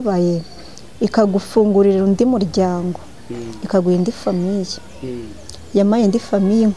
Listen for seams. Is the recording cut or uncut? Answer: uncut